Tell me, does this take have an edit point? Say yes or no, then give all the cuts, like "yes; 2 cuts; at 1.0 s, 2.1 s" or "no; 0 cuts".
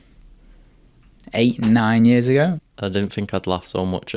yes; 1 cut; at 2.6 s